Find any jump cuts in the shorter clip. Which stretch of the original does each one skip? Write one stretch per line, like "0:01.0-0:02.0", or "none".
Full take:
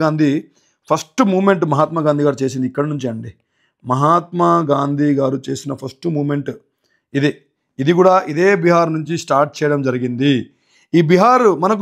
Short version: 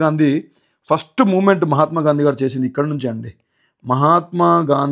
none